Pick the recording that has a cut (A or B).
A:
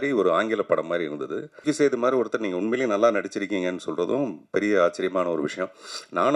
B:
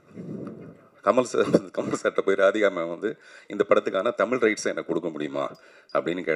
A